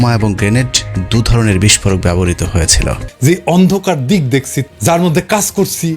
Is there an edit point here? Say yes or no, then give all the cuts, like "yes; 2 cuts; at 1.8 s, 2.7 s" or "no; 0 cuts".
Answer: yes; 1 cut; at 3.0 s